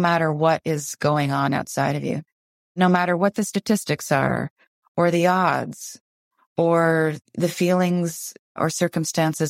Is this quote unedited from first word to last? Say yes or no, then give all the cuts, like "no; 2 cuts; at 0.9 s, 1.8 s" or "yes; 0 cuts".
no; 3 cuts; at 2.4 s, 7.2 s, 8.6 s